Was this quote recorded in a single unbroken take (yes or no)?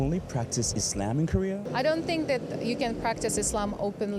yes